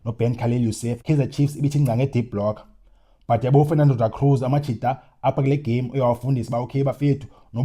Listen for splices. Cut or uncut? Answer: cut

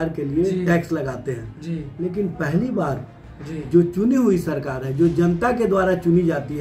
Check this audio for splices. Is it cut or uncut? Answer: uncut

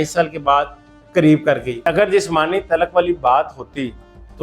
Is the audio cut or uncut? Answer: cut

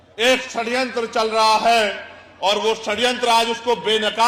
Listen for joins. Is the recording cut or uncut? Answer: uncut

